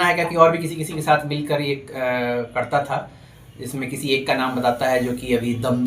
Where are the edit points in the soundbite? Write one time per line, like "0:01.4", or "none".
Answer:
none